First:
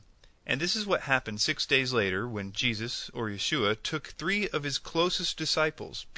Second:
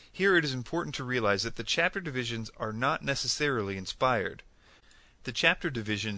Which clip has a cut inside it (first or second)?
second